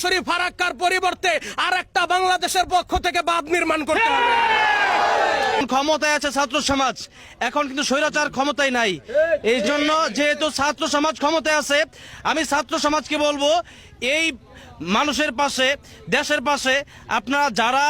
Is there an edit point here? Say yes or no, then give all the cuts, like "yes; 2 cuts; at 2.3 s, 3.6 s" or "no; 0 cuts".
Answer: yes; 1 cut; at 5.6 s